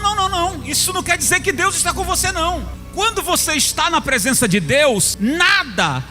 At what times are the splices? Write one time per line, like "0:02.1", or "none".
0:02.8
0:05.1